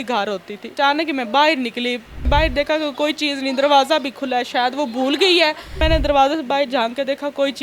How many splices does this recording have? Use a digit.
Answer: 3